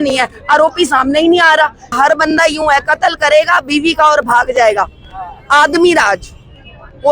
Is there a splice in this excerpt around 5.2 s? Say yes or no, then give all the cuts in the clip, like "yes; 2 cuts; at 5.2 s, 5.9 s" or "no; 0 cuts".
no; 1 cut; at 1.9 s